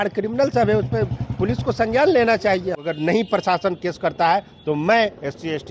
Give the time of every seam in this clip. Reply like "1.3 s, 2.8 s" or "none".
2.8 s